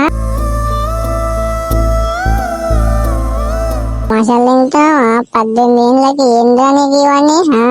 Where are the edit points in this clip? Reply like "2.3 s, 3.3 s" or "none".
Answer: 4.1 s